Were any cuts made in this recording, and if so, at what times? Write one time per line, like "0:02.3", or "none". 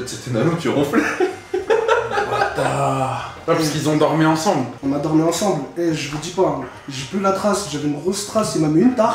none